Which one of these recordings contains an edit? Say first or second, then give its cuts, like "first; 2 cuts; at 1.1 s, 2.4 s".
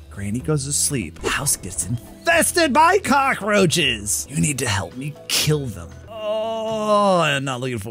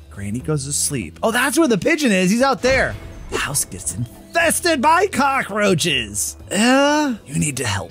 first; 3 cuts; at 1.0 s, 4.3 s, 6.0 s